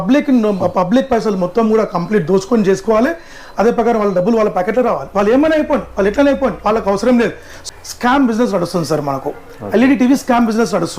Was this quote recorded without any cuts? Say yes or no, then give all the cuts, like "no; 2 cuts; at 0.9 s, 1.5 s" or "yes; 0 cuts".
no; 1 cut; at 7.6 s